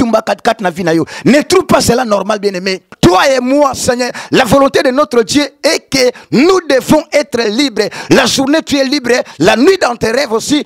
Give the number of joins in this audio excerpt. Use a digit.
1